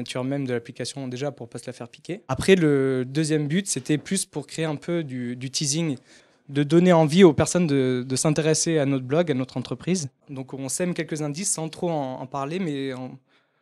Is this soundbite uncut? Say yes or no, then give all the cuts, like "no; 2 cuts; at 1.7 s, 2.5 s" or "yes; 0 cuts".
no; 1 cut; at 8.0 s